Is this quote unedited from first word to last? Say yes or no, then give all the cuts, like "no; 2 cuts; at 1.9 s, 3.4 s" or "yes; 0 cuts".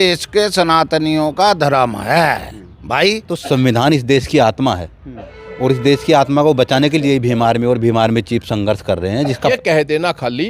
no; 2 cuts; at 3.4 s, 9.5 s